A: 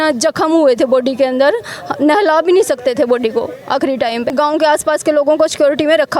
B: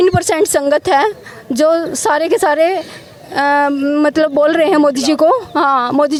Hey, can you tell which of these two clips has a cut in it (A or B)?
A